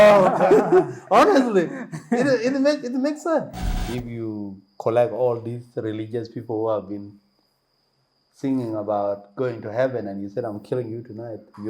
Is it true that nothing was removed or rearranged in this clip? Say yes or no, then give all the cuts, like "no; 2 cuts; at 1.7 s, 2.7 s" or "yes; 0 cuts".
no; 1 cut; at 3.6 s